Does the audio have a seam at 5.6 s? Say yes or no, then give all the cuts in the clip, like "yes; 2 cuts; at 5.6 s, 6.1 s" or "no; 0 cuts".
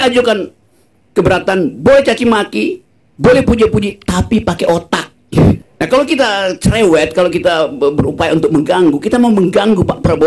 yes; 1 cut; at 5.6 s